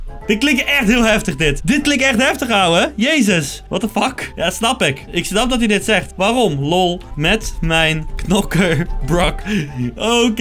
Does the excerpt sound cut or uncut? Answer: uncut